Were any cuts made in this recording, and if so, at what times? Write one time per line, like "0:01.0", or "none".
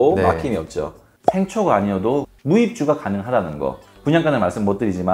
0:01.2